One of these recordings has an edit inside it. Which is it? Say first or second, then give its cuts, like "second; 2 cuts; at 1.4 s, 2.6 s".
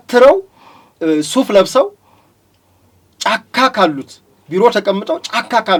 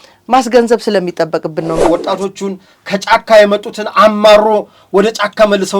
second; 1 cut; at 1.8 s